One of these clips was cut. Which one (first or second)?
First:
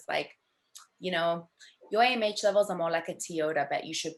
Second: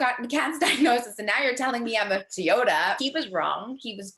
second